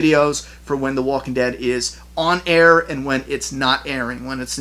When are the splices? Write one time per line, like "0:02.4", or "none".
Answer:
none